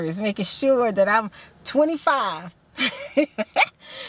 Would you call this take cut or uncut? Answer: uncut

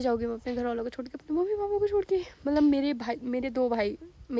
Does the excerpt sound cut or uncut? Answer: uncut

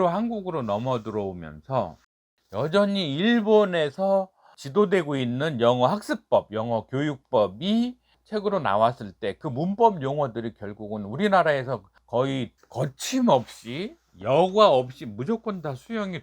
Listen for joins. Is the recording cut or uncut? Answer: cut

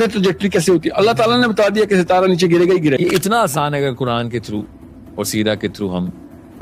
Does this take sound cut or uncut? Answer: cut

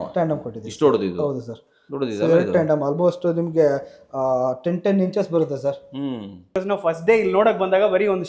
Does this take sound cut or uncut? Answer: cut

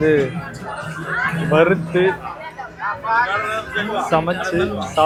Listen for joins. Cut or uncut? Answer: uncut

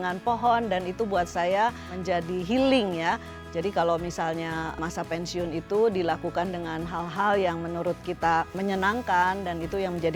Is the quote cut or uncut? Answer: cut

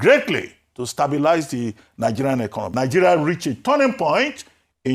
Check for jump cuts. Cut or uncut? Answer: cut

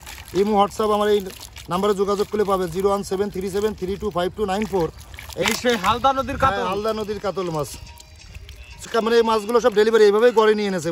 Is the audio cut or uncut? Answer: cut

